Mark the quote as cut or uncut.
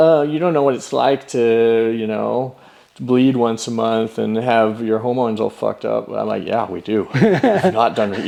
uncut